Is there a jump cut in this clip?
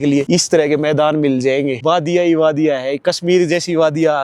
no; 0 cuts

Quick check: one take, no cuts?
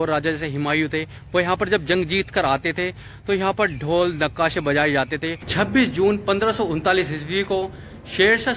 no; 1 cut; at 5.5 s

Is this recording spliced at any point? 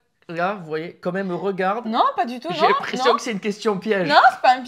no; 0 cuts

